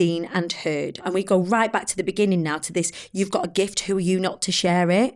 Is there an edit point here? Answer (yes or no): yes